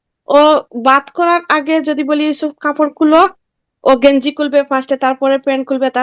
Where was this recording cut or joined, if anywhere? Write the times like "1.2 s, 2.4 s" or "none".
none